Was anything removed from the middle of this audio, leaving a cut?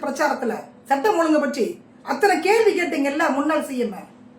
no; 0 cuts

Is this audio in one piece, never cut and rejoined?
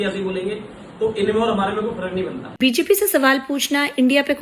no; 1 cut; at 2.4 s

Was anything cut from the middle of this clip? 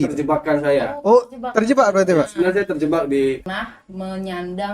yes; 1 cut; at 3.5 s

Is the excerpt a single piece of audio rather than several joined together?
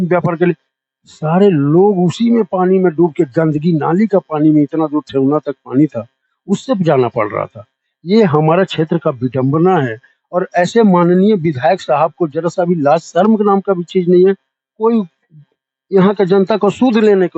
yes; 0 cuts

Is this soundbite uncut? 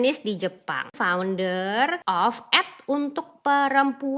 no; 2 cuts; at 0.9 s, 2.0 s

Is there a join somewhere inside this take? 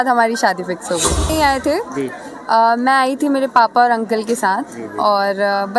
yes; 1 cut; at 1.3 s

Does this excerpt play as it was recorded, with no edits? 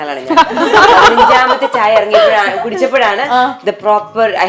yes; 0 cuts

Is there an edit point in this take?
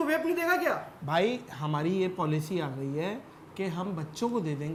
no; 0 cuts

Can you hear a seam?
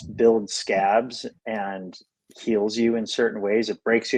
no; 0 cuts

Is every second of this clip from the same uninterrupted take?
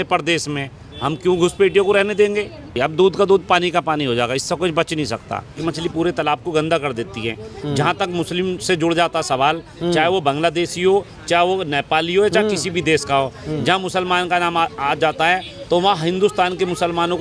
no; 2 cuts; at 2.7 s, 5.6 s

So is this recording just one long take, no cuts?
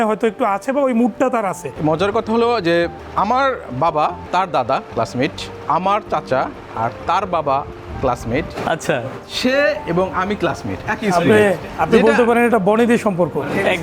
no; 5 cuts; at 1.6 s, 3.0 s, 4.2 s, 5.5 s, 11.7 s

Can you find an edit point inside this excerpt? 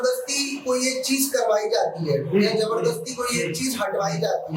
no; 0 cuts

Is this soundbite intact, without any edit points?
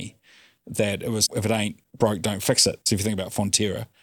no; 1 cut; at 2.8 s

